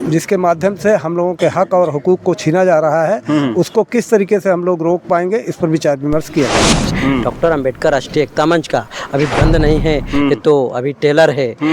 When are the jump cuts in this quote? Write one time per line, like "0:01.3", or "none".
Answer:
0:06.8